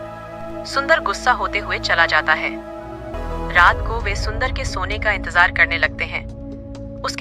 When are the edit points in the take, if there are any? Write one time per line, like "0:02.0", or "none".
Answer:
0:03.1